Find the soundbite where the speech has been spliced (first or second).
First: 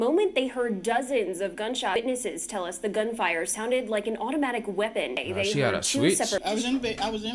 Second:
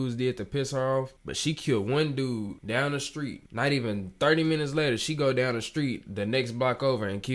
first